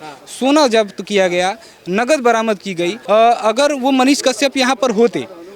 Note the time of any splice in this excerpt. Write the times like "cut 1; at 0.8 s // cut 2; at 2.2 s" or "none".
cut 1; at 3.0 s